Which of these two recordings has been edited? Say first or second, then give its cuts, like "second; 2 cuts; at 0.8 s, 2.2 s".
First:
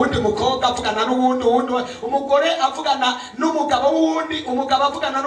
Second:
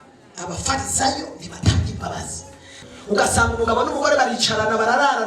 second; 1 cut; at 2.7 s